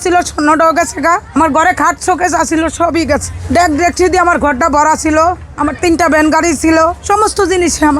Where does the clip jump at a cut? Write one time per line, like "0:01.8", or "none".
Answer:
0:01.3
0:03.3
0:05.5
0:07.0

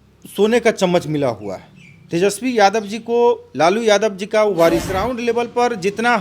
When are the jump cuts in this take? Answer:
0:05.1

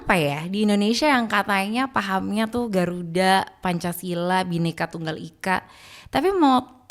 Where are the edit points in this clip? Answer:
none

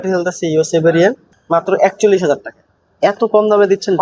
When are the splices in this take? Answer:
none

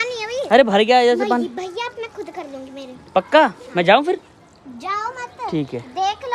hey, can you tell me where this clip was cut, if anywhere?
none

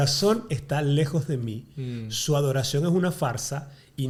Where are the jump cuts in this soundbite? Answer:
none

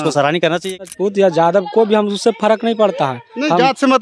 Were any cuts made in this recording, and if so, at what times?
0:00.9

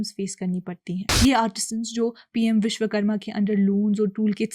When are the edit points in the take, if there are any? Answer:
0:01.0

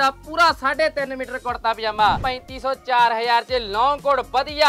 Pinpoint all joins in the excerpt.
0:02.3

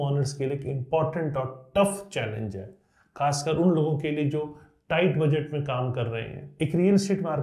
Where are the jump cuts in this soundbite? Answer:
0:06.4

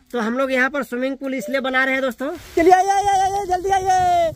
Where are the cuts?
0:02.4

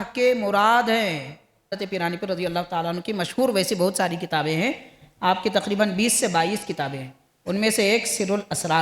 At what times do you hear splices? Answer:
0:01.7

